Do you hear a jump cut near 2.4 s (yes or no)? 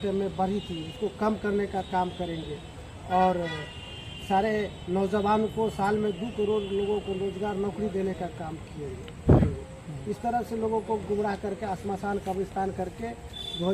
no